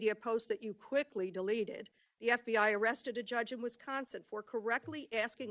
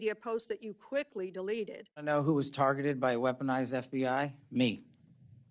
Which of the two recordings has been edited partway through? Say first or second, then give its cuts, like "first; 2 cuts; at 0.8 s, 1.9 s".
second; 1 cut; at 2.1 s